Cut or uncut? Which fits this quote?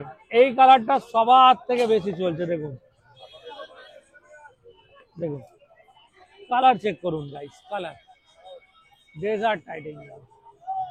uncut